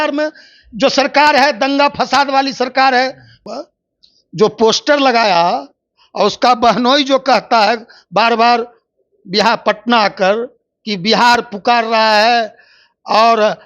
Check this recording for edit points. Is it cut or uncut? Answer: cut